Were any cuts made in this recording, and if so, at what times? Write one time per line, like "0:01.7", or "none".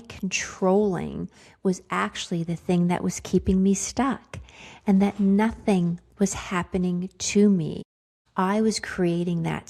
none